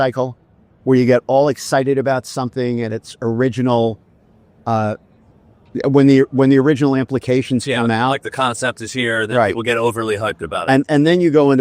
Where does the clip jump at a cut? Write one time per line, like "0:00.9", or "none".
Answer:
none